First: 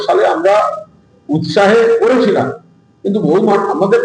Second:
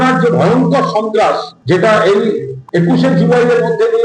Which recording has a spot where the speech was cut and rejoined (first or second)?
second